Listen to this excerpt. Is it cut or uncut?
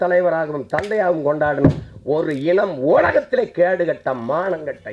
uncut